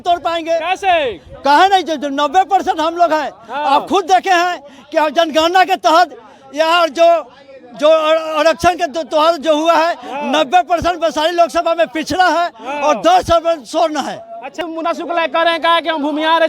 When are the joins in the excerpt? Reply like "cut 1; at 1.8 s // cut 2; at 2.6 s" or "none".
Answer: cut 1; at 14.6 s